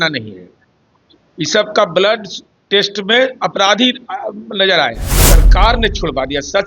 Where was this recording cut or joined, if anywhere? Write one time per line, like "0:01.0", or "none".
0:05.4

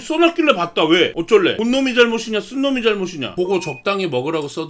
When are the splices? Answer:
0:03.2

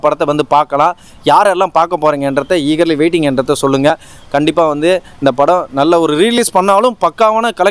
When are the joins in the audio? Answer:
none

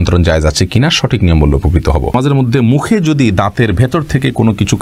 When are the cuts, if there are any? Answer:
0:02.1

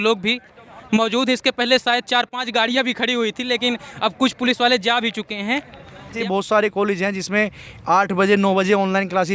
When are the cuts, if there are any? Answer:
0:06.1

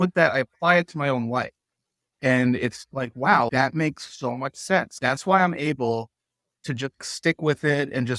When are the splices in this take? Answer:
0:02.1
0:03.5
0:04.9
0:07.0

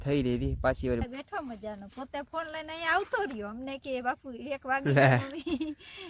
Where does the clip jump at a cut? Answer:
0:01.0

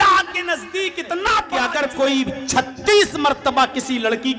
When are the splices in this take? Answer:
0:01.5

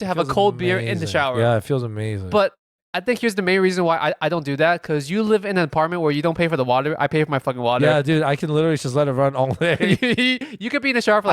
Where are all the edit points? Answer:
0:02.8

